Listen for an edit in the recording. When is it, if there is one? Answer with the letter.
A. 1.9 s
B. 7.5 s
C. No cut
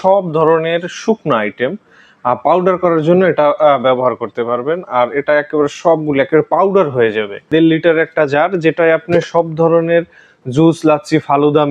B